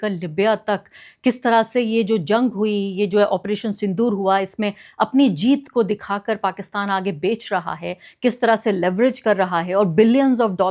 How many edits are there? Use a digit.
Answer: 0